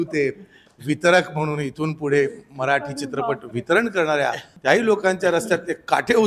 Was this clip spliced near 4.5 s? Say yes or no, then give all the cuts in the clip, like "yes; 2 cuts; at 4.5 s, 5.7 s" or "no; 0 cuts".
yes; 1 cut; at 4.5 s